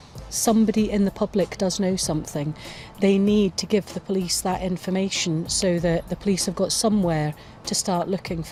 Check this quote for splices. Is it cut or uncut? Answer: uncut